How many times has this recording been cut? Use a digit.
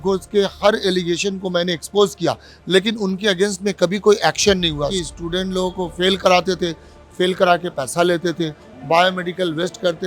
1